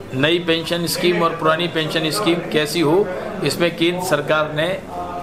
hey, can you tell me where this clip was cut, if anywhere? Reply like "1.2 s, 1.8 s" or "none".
none